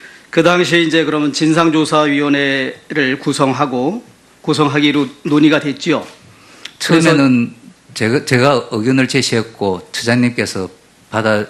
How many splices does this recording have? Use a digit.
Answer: 1